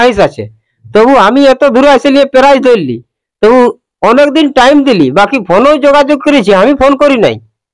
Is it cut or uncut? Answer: uncut